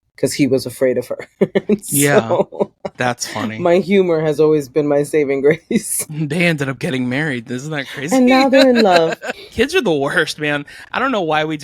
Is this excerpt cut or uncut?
cut